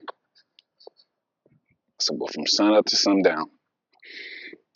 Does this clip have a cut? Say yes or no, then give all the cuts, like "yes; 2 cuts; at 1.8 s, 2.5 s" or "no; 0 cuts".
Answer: yes; 1 cut; at 2.1 s